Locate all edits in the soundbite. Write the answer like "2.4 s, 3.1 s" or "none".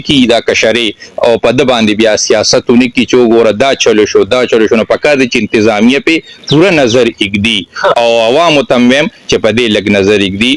none